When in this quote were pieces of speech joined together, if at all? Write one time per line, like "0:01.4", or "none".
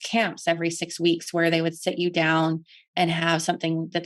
none